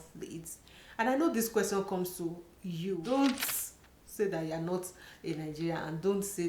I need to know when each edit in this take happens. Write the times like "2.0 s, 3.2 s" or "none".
3.0 s